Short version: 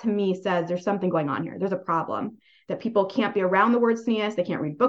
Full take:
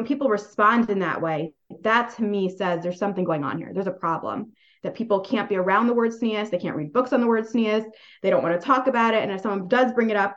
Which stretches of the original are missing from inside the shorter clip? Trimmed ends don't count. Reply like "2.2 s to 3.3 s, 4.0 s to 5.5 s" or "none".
none